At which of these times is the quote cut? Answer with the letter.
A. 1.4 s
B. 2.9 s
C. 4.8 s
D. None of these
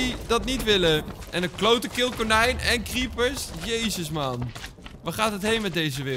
D